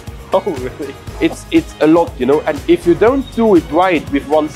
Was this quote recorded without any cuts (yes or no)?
no